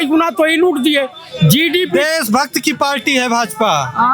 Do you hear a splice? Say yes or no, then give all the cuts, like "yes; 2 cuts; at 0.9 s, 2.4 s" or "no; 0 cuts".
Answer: no; 0 cuts